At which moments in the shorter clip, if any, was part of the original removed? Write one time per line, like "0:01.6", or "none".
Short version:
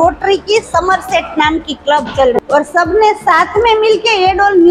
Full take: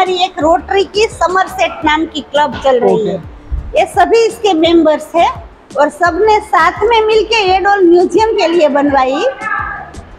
0:02.4